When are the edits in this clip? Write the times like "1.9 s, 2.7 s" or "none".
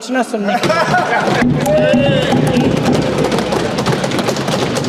none